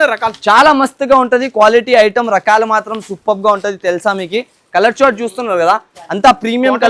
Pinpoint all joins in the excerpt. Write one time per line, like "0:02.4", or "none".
none